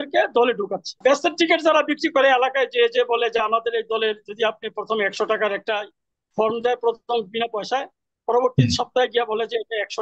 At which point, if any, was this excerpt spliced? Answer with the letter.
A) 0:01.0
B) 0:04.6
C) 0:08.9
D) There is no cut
A